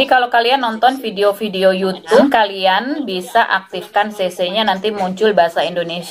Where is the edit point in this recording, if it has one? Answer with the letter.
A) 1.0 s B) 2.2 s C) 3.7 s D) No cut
B